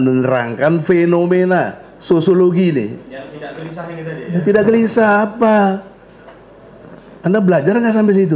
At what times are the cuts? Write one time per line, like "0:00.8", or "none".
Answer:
none